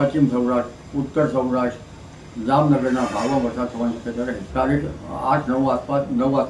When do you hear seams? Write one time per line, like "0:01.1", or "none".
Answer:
0:04.4